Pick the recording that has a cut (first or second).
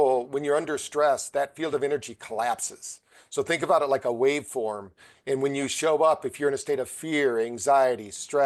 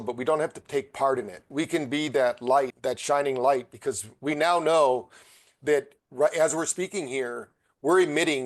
second